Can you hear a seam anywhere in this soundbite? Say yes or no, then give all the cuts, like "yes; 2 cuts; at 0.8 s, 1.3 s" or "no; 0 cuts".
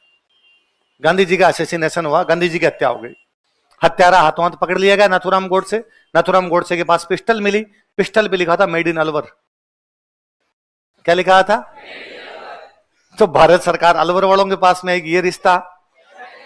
no; 0 cuts